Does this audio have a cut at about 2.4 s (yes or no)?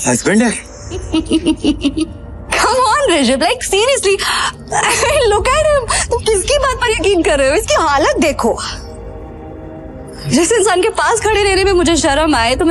no